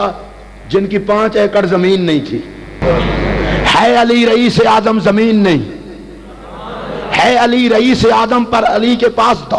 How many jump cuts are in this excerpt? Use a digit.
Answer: 1